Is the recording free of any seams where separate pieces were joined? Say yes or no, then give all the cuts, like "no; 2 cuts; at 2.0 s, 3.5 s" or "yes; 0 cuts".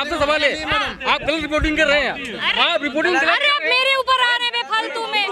yes; 0 cuts